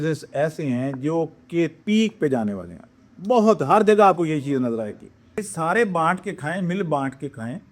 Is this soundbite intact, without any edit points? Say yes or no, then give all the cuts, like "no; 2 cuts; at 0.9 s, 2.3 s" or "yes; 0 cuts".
no; 1 cut; at 5.4 s